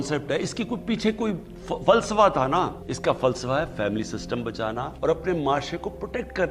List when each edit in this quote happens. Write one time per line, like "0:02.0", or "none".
0:02.8
0:04.9